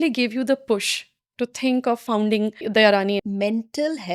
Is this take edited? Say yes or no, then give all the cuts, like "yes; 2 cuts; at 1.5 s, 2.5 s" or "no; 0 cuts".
yes; 2 cuts; at 2.2 s, 3.2 s